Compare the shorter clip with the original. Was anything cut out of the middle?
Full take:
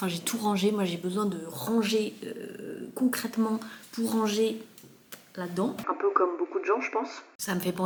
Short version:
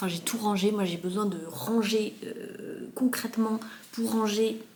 no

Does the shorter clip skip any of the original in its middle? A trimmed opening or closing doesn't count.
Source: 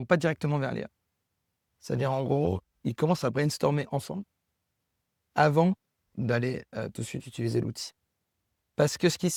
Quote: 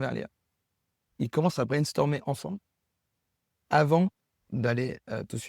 yes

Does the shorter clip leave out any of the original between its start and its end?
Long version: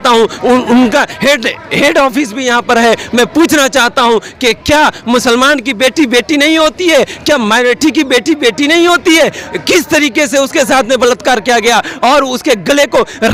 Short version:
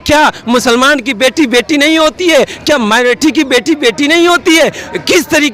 no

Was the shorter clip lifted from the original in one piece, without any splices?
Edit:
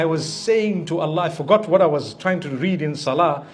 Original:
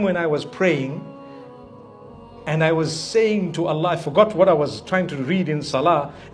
yes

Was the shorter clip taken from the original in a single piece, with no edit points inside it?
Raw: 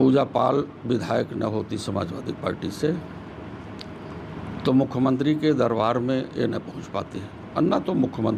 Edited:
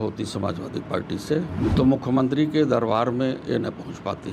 no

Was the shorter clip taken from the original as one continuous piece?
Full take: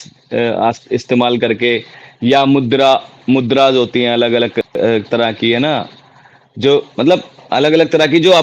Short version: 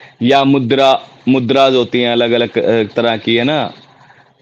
no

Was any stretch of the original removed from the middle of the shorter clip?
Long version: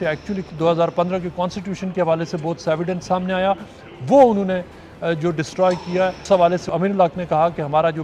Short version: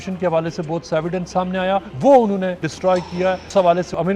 yes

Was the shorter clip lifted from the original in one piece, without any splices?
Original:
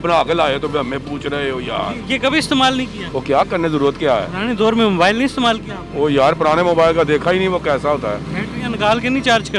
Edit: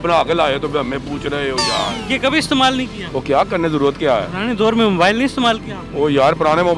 yes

